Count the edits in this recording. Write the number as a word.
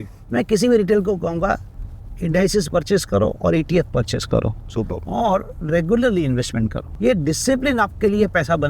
one